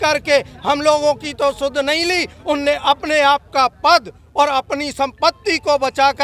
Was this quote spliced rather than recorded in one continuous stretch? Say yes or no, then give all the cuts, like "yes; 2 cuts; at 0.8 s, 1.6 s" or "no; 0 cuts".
no; 0 cuts